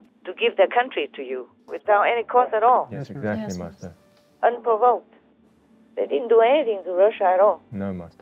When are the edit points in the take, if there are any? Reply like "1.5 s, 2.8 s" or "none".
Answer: 1.6 s